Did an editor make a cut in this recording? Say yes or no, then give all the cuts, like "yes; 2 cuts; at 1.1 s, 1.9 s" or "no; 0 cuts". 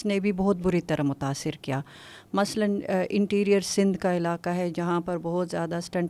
no; 0 cuts